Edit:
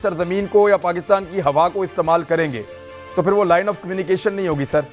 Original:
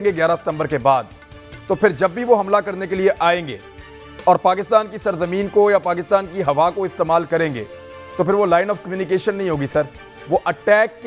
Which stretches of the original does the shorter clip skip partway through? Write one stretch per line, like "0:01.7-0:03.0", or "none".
none